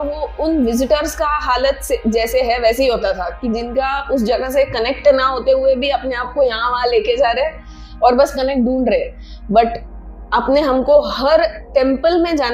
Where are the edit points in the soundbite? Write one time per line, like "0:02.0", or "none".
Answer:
none